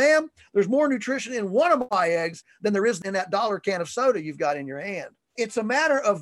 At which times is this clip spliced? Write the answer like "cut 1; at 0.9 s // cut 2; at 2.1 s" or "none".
cut 1; at 1.9 s // cut 2; at 3.0 s // cut 3; at 5.4 s